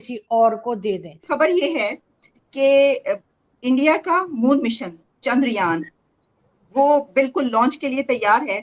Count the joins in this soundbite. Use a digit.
1